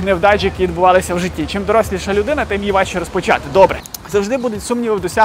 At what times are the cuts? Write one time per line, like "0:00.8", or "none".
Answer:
0:03.9